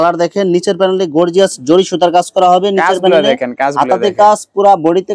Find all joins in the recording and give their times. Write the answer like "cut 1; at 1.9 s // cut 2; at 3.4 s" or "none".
none